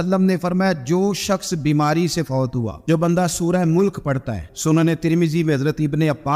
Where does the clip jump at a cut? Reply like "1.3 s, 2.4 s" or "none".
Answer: 2.8 s